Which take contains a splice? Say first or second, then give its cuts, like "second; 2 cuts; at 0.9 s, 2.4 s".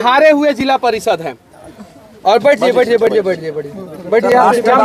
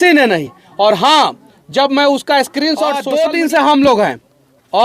second; 1 cut; at 3.0 s